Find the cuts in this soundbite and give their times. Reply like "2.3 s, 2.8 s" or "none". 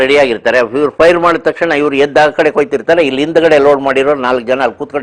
none